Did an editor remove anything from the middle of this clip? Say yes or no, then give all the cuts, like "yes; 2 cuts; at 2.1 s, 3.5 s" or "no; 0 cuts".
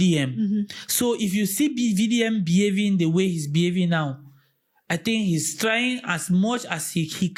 no; 0 cuts